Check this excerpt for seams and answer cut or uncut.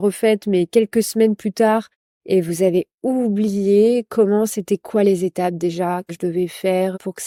uncut